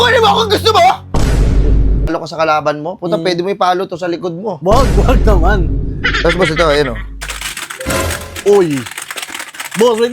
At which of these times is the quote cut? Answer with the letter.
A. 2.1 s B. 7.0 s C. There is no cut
A